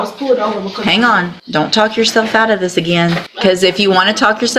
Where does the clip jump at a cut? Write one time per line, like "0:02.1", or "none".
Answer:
0:01.4
0:03.3